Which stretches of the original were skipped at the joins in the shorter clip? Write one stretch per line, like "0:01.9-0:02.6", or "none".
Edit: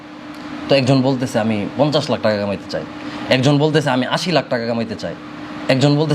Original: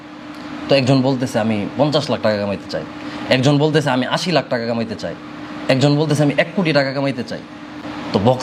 none